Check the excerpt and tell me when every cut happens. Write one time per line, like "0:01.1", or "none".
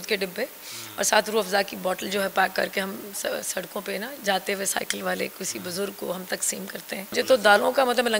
0:07.1